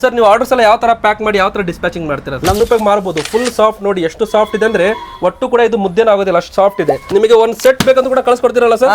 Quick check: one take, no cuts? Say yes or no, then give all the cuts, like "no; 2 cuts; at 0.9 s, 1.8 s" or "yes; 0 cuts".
no; 2 cuts; at 2.6 s, 7.0 s